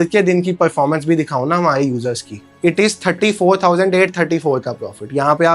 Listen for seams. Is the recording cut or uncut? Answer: cut